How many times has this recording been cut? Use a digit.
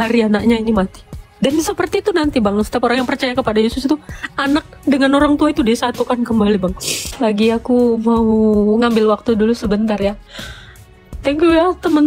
1